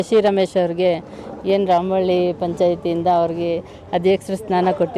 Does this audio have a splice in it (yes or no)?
no